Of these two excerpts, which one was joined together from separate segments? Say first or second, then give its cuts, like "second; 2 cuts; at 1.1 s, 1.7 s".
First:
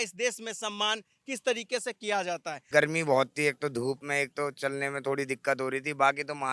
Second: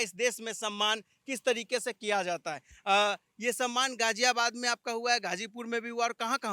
first; 2 cuts; at 2.6 s, 4.0 s